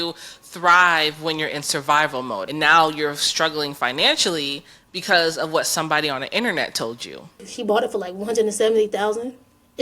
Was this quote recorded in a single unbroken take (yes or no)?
no